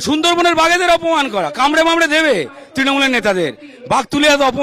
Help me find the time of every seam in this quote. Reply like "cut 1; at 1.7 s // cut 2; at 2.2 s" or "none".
none